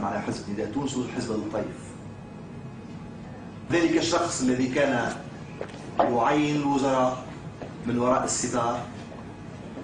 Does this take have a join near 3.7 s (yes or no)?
yes